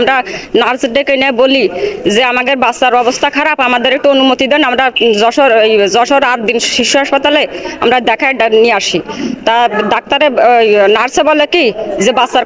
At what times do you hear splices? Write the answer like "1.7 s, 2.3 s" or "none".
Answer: none